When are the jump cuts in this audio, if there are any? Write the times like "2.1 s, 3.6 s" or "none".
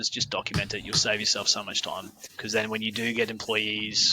2.2 s

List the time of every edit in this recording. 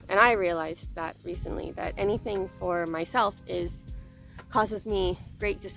none

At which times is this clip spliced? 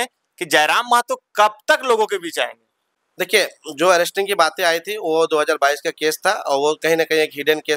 none

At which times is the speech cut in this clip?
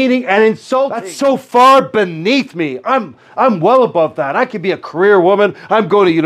1.1 s

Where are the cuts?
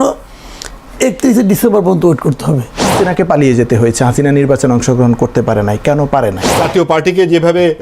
2.9 s, 6.5 s

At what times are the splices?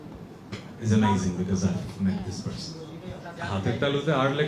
3.3 s

